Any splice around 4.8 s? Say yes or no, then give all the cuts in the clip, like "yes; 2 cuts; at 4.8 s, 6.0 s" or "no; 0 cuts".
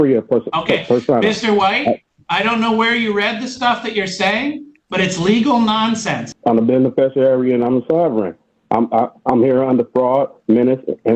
no; 2 cuts; at 2.2 s, 6.3 s